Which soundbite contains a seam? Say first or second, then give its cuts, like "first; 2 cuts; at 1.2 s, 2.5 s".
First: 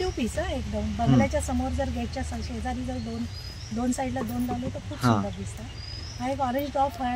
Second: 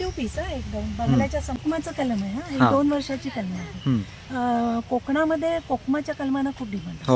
second; 1 cut; at 1.6 s